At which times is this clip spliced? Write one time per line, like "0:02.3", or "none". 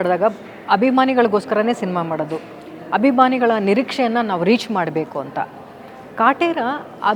none